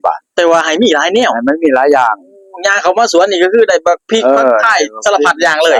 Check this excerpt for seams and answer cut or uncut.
uncut